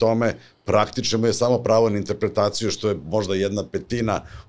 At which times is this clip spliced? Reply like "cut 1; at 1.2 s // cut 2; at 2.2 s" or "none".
none